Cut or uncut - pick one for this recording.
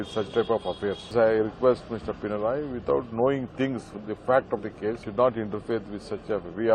cut